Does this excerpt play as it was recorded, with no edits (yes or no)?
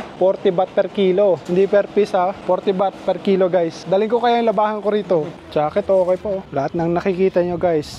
no